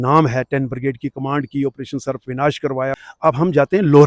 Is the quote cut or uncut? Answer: cut